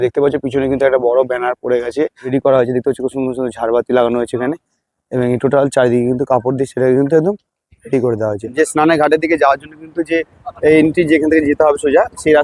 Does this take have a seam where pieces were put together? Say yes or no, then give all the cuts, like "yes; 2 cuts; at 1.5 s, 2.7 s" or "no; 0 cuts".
yes; 2 cuts; at 2.3 s, 8.5 s